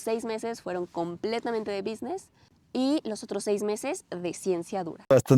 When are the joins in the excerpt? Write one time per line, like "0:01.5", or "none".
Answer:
none